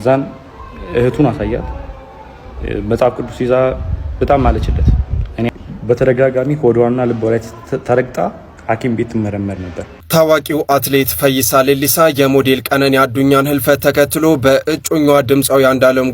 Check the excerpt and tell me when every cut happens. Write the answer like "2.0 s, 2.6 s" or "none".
5.5 s, 9.9 s